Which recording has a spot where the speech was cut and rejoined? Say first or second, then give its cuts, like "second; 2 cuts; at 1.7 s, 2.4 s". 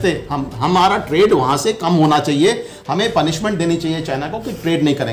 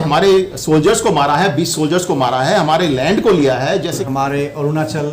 second; 1 cut; at 4.0 s